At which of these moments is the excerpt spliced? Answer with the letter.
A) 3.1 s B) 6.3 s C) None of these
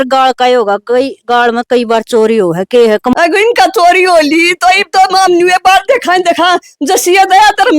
A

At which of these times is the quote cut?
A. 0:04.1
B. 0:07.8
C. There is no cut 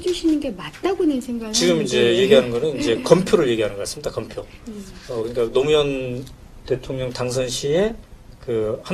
C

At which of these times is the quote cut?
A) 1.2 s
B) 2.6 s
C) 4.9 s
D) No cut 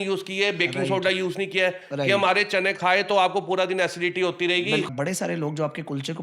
C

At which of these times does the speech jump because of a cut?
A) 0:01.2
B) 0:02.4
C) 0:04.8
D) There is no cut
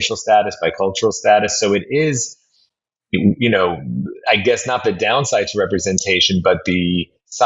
D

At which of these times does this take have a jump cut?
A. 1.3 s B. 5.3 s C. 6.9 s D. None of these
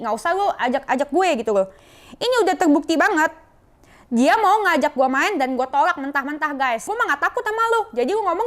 C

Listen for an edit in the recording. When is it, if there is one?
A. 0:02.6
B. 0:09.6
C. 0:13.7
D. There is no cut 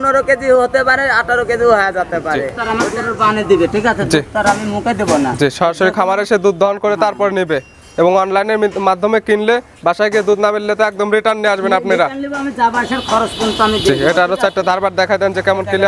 A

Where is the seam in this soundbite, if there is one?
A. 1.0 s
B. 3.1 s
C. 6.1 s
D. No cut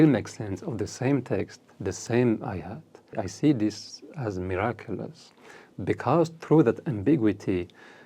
B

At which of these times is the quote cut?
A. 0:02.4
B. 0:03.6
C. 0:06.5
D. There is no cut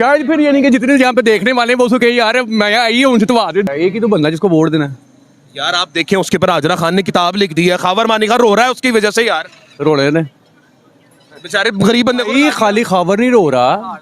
B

